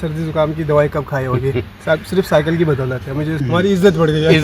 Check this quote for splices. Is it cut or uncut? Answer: cut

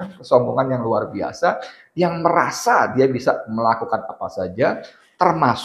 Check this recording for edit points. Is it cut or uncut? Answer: uncut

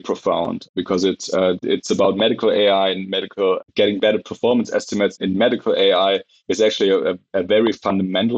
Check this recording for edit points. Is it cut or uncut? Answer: uncut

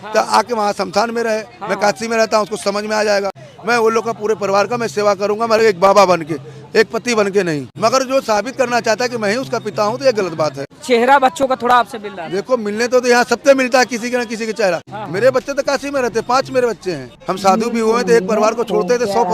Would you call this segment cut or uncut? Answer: cut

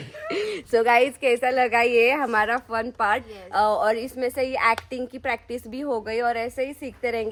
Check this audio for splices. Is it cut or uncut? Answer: uncut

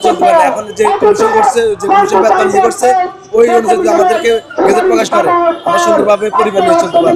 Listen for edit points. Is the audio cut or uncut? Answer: uncut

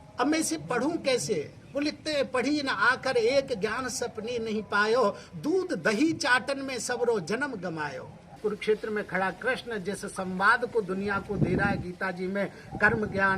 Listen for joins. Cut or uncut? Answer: cut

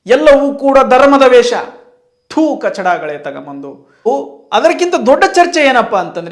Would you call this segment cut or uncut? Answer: cut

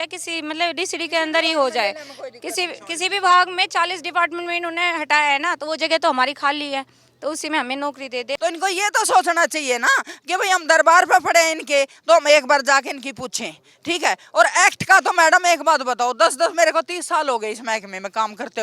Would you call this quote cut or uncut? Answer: cut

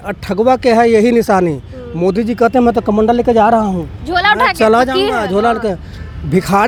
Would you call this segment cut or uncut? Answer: uncut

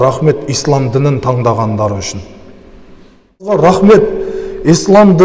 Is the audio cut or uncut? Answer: cut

